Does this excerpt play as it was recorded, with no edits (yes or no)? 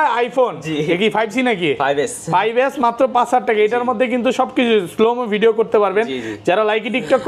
yes